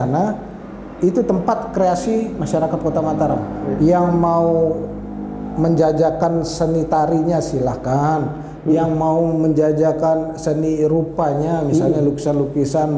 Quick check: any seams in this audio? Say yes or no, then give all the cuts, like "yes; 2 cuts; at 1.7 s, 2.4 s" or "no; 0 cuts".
no; 0 cuts